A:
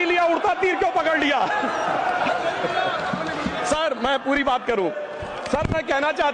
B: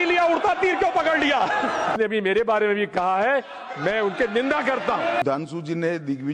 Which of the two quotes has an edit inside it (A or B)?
B